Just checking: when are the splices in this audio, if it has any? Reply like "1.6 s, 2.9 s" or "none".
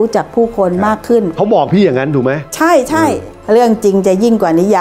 1.4 s, 3.3 s